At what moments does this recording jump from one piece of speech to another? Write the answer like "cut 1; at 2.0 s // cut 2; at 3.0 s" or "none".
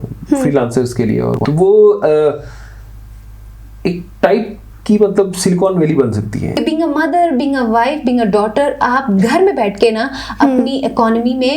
cut 1; at 1.4 s // cut 2; at 6.5 s